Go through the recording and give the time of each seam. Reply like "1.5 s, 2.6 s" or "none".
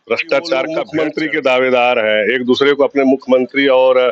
0.9 s